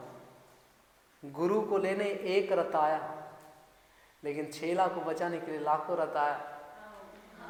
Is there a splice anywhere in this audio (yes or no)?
no